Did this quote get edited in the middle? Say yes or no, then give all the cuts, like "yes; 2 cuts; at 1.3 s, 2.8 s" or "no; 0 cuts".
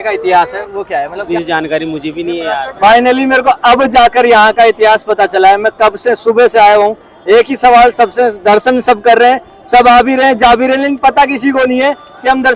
yes; 2 cuts; at 1.3 s, 2.8 s